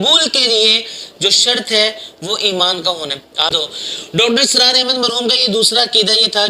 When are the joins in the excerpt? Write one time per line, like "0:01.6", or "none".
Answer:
0:03.5